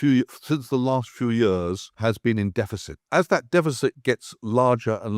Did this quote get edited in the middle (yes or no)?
yes